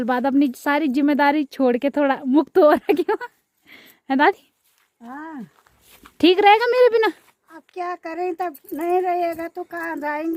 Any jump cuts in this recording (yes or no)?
no